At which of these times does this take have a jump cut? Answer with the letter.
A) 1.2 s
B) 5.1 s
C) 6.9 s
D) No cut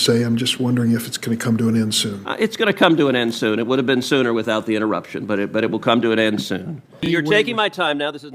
C